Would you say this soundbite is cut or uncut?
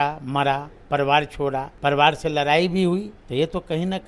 cut